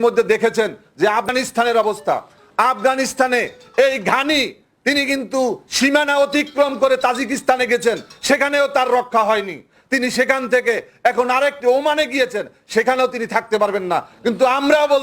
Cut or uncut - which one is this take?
cut